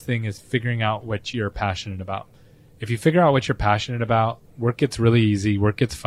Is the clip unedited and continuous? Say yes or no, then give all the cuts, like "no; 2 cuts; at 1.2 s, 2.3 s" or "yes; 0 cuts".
yes; 0 cuts